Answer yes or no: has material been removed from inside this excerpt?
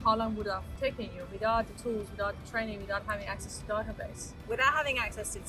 no